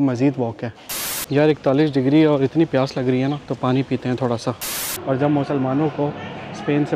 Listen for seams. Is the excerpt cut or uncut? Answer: cut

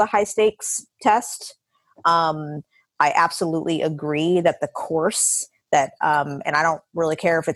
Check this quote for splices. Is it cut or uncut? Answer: uncut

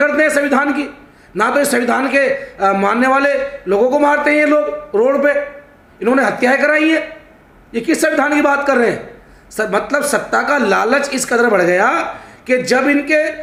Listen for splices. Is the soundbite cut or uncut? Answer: uncut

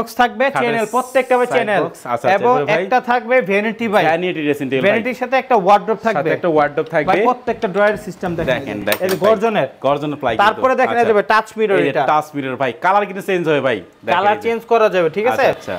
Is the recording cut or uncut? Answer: uncut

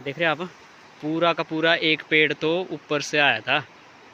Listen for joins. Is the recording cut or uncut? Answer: uncut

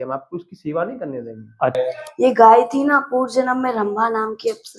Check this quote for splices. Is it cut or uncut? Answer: cut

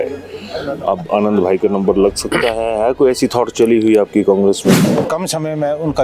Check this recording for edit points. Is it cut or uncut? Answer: cut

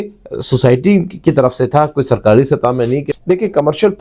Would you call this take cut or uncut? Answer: cut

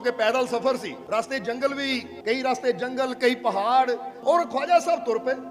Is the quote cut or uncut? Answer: cut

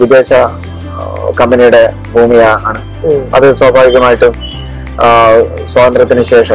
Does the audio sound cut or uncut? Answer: uncut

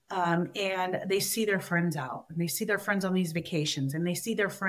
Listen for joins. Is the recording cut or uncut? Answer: uncut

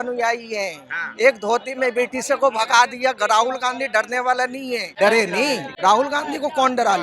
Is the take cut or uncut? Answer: cut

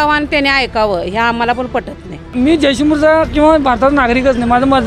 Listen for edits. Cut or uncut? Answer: cut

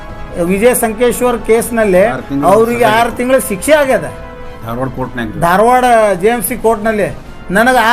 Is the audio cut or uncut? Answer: uncut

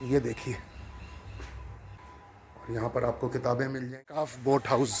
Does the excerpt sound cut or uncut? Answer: cut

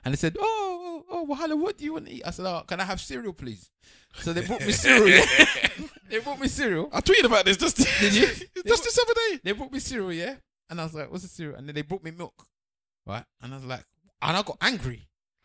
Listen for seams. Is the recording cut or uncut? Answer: uncut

